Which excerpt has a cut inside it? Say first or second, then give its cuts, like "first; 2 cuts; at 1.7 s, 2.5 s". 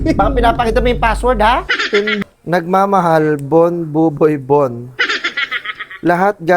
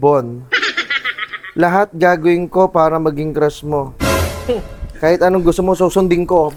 first; 1 cut; at 2.2 s